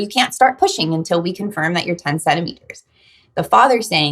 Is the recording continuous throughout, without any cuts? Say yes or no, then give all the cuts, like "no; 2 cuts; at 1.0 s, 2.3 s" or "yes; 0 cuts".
yes; 0 cuts